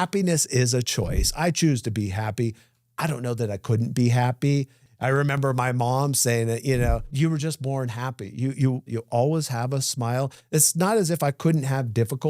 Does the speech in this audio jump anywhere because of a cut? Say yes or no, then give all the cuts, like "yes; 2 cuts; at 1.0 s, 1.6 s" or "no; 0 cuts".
yes; 3 cuts; at 4.8 s, 7.1 s, 8.9 s